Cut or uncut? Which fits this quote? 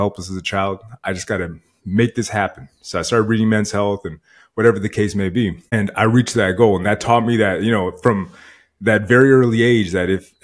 cut